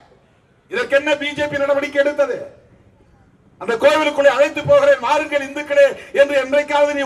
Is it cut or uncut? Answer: uncut